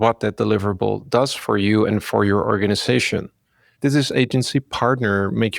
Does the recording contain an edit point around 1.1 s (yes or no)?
no